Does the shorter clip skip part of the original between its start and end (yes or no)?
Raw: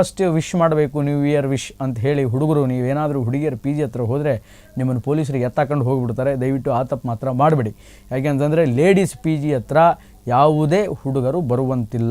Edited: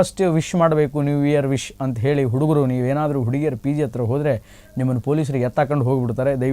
no